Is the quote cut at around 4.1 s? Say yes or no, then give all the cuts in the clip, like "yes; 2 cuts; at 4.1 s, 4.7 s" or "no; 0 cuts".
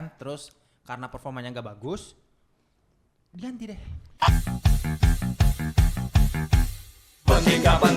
yes; 1 cut; at 4.1 s